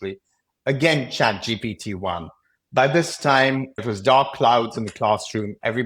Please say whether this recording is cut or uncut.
cut